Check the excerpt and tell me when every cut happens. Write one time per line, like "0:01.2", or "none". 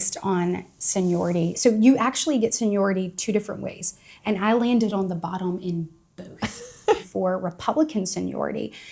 0:01.5
0:07.1